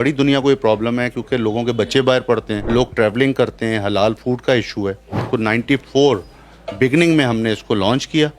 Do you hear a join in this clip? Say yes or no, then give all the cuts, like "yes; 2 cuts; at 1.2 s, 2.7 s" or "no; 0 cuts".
yes; 2 cuts; at 2.6 s, 5.2 s